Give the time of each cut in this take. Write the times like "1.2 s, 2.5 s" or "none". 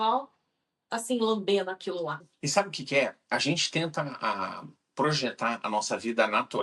2.2 s